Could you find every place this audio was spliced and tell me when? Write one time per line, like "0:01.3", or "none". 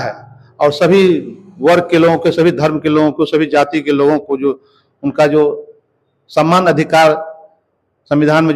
none